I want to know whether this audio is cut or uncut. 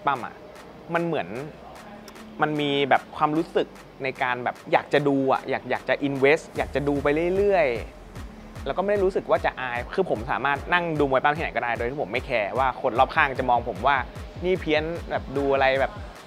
cut